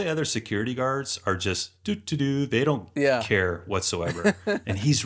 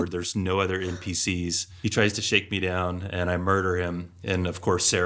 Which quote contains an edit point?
second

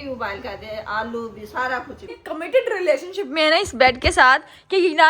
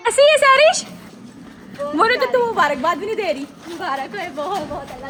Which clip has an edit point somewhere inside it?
first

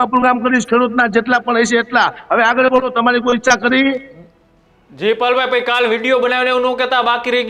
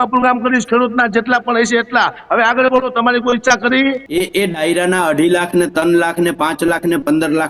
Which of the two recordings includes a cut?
second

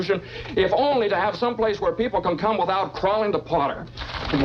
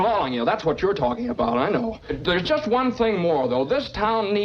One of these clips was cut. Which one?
second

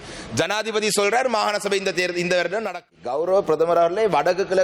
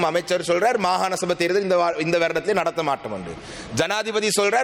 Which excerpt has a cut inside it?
first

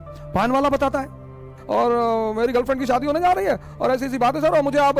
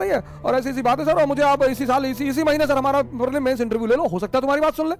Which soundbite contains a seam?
first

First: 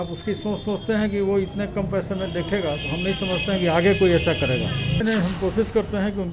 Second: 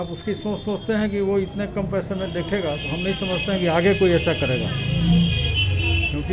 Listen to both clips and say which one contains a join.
first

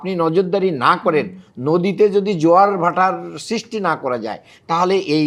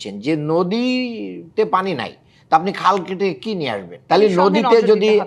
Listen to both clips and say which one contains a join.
second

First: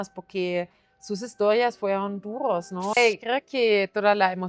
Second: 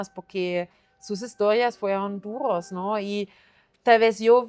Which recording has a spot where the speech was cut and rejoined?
first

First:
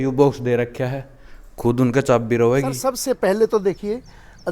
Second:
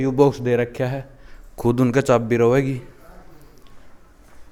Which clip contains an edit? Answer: first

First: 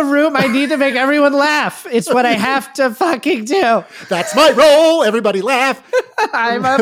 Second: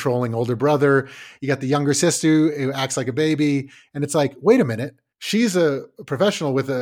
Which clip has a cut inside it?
second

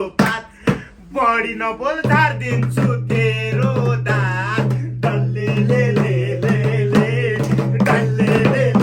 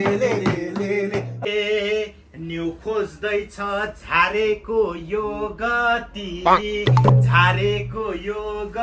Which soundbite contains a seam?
second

